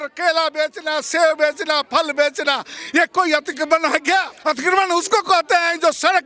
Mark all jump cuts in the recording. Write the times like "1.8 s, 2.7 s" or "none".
2.8 s, 4.3 s